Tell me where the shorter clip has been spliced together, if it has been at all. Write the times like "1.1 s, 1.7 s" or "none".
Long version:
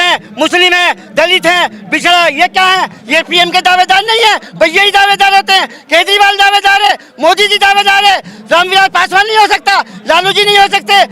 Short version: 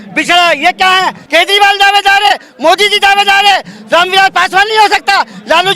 1.2 s